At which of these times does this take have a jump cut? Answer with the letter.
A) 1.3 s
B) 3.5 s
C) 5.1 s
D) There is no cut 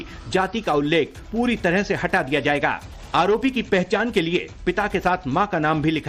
D